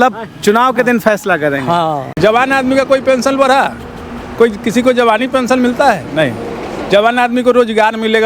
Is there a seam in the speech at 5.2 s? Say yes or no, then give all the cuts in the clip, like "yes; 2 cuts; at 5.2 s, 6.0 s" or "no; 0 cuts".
no; 1 cut; at 2.2 s